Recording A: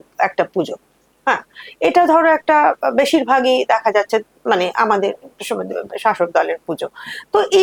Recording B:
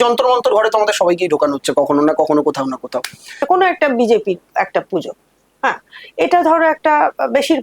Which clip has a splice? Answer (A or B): B